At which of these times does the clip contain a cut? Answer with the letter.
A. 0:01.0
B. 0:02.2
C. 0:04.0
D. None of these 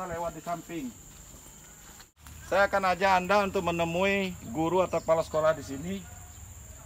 B